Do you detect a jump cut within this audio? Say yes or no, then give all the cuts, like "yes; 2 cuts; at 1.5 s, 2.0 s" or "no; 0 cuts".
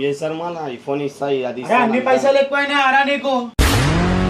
no; 0 cuts